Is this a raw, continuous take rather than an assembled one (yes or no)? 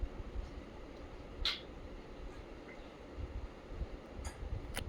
yes